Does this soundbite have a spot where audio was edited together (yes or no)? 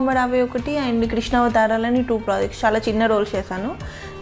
no